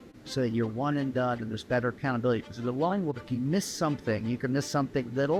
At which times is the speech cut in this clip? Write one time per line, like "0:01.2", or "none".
none